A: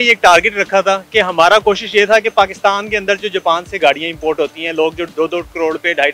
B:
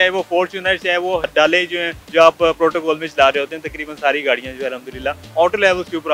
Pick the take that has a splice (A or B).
B